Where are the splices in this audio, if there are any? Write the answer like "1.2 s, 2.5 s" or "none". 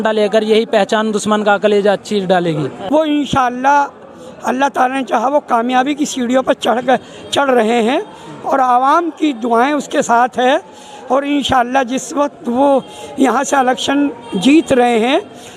2.7 s